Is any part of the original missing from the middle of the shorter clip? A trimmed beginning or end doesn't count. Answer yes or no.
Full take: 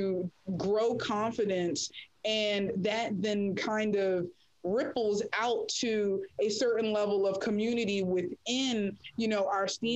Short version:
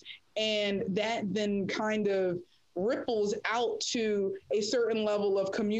no